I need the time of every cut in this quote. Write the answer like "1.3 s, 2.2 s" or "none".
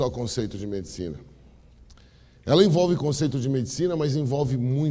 none